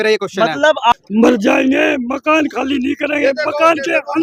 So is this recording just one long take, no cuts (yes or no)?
no